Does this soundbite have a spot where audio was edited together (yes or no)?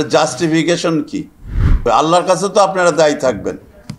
yes